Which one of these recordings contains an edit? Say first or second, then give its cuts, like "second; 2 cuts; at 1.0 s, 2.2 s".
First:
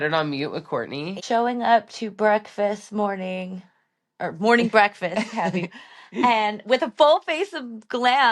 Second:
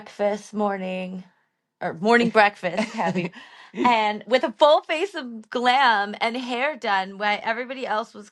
first; 1 cut; at 1.1 s